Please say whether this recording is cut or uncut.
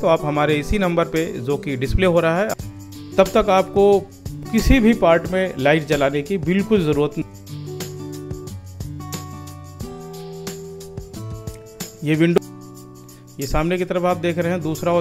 cut